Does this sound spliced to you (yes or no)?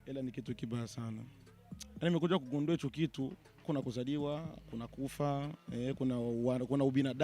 yes